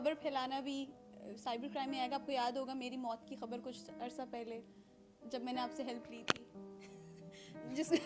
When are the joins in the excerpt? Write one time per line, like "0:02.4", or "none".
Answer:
none